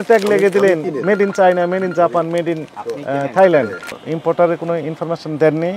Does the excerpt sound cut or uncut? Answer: cut